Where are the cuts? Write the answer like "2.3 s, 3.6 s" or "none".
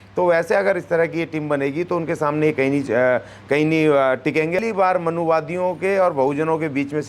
4.6 s